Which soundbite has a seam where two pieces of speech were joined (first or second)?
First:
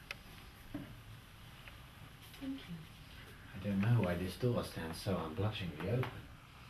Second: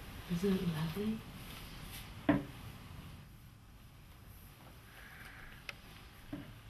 second